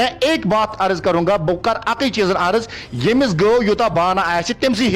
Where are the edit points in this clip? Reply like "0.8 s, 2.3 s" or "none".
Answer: none